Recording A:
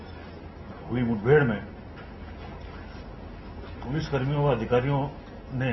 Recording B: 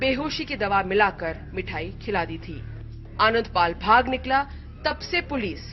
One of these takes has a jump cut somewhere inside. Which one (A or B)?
B